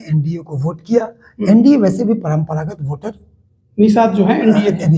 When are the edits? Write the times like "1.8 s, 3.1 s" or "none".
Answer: none